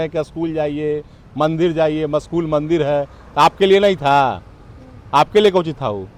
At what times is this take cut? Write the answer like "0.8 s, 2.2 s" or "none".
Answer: none